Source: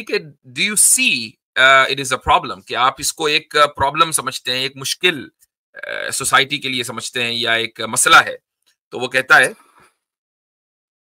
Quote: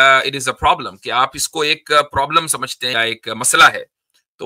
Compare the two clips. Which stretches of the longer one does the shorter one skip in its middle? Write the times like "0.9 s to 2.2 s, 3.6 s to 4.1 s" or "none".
4.6 s to 7.5 s